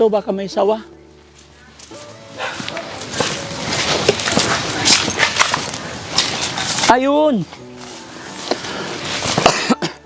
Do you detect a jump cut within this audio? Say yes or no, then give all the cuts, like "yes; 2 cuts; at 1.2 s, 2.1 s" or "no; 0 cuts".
no; 0 cuts